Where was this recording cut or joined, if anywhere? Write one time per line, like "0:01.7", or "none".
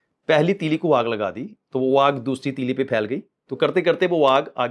none